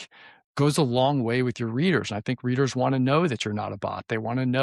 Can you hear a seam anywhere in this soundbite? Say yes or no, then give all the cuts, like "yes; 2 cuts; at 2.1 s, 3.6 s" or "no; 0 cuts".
no; 0 cuts